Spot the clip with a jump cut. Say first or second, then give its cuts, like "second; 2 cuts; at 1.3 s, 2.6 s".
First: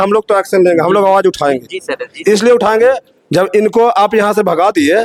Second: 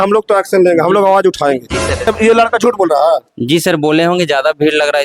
second; 1 cut; at 2.1 s